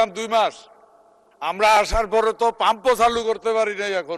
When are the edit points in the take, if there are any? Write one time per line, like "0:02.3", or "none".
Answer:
none

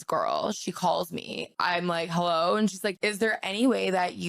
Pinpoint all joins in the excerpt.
0:01.5
0:03.0

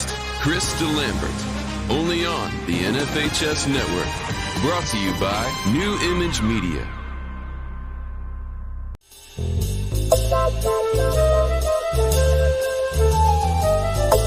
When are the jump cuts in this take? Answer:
none

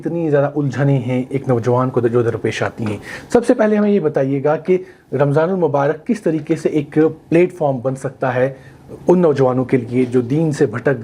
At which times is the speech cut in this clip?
none

